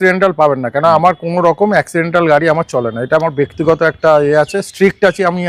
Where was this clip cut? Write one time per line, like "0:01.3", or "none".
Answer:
none